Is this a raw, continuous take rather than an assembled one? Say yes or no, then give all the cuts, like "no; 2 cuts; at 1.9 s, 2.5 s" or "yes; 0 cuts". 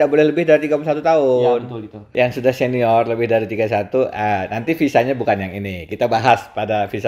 yes; 0 cuts